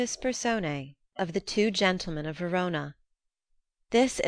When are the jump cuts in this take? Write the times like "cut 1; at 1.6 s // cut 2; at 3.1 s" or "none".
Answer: cut 1; at 1.0 s